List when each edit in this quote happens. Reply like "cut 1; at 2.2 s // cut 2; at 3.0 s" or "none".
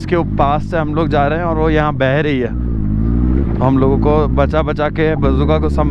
none